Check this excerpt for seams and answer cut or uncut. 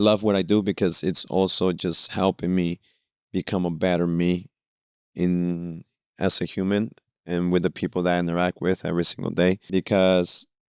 cut